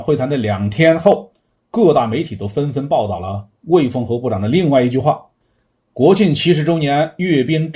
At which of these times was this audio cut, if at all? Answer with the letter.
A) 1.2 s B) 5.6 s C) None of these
C